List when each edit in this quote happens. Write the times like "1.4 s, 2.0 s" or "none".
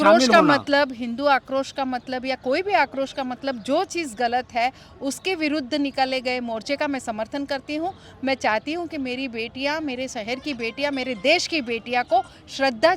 none